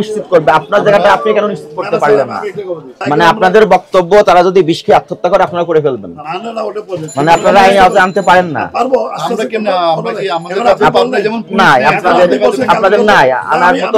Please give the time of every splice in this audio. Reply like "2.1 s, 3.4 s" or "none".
3.0 s, 6.1 s